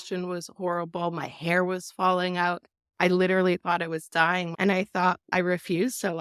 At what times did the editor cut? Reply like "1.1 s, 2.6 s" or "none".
4.5 s, 5.3 s